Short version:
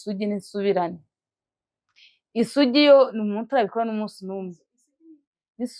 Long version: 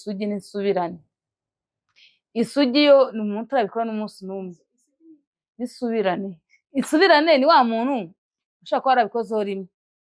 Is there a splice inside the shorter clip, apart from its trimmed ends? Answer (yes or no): no